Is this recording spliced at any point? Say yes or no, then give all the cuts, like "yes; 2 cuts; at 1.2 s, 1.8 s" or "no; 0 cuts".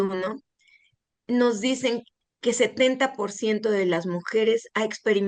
yes; 1 cut; at 2.1 s